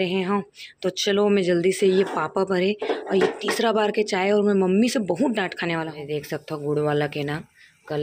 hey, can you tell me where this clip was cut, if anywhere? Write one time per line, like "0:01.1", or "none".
0:06.0